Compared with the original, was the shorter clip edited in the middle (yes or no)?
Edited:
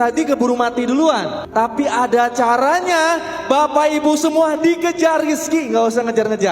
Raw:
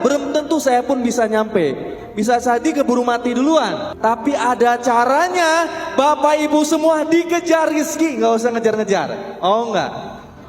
no